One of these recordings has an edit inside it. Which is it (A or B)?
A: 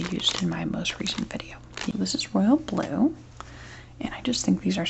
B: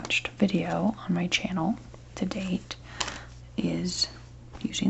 A